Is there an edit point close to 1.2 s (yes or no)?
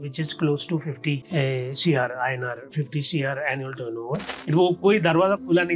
yes